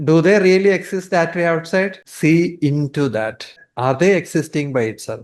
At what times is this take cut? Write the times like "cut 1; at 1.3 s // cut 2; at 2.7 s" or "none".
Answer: cut 1; at 2.1 s // cut 2; at 3.6 s